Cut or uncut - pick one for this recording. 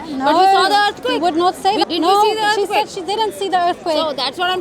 cut